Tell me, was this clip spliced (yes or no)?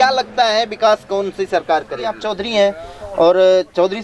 yes